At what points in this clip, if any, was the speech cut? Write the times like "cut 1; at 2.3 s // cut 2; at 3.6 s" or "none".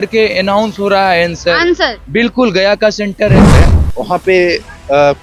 cut 1; at 3.6 s